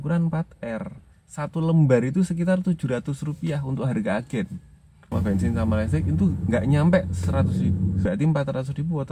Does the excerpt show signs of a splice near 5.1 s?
yes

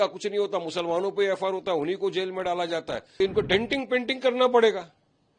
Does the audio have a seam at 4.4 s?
no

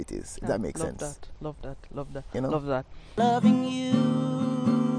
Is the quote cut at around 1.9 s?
no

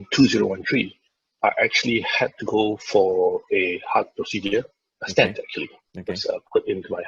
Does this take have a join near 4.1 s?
no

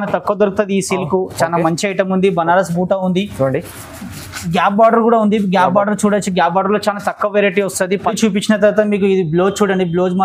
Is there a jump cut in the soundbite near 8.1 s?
yes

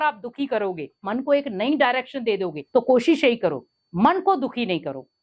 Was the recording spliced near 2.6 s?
yes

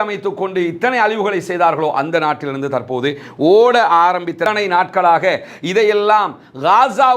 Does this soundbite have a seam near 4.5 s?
yes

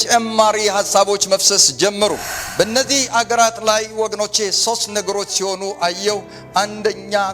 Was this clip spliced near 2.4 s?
yes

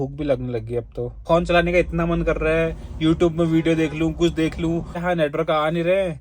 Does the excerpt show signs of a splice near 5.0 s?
yes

